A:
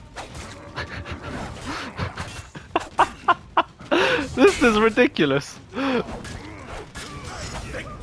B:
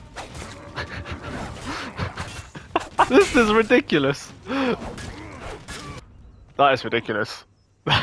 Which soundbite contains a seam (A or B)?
B